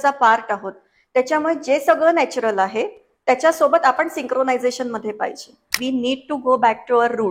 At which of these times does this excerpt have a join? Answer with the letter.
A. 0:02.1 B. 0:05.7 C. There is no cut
B